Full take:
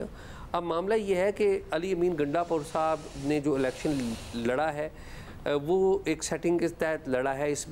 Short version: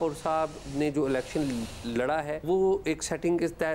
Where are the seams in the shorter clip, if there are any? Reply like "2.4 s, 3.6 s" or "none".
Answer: 2.4 s